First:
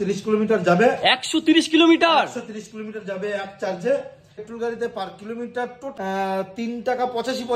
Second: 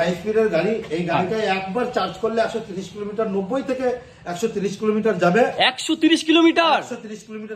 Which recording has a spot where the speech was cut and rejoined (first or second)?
first